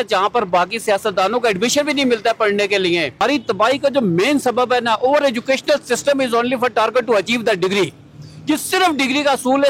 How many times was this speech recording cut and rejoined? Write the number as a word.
one